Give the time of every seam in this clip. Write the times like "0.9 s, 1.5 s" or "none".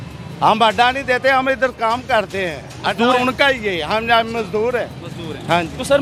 none